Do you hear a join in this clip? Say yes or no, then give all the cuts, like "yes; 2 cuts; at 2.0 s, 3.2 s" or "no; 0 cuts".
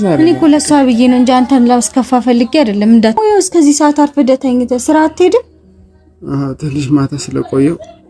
yes; 1 cut; at 3.2 s